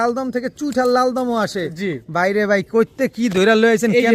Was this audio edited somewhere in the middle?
no; 0 cuts

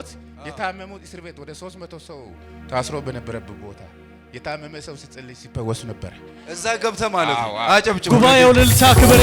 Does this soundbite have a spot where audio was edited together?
no; 0 cuts

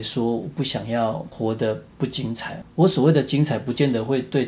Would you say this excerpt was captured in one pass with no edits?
no; 1 cut; at 1.7 s

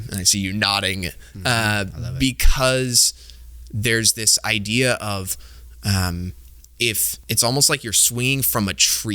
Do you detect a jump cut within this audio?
yes; 1 cut; at 7.1 s

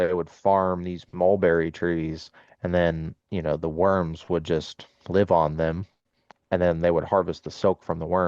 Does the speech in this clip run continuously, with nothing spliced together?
no; 1 cut; at 6.3 s

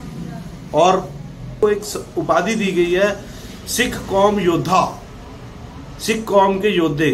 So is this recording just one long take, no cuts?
no; 1 cut; at 1.5 s

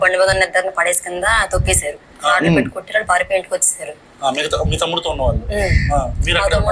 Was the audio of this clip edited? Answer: no; 0 cuts

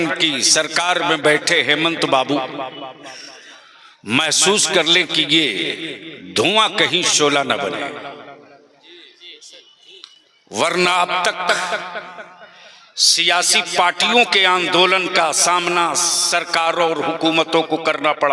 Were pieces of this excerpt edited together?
no; 0 cuts

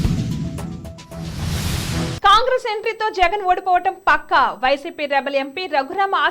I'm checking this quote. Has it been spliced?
yes; 1 cut; at 2.2 s

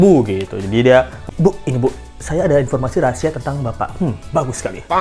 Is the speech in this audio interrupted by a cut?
yes; 1 cut; at 1.3 s

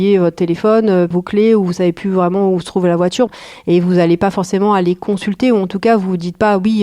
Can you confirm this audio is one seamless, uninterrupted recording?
no; 2 cuts; at 1.1 s, 3.3 s

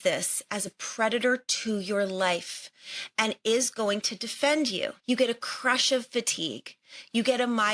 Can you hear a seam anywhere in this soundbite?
yes; 1 cut; at 5.0 s

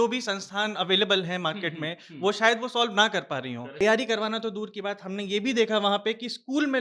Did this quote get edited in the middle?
yes; 1 cut; at 3.8 s

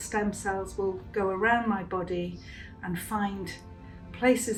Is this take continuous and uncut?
yes; 0 cuts

